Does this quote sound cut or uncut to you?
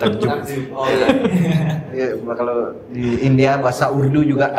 uncut